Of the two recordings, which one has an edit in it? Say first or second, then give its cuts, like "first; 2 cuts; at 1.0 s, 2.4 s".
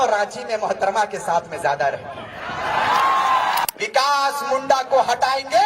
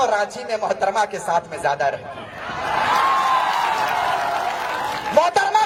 first; 1 cut; at 3.6 s